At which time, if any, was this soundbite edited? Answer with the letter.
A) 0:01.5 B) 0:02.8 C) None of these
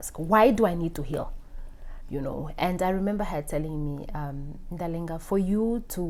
C